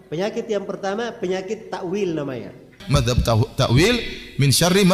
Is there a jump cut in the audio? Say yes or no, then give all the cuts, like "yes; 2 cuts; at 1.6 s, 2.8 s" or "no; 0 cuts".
yes; 1 cut; at 2.8 s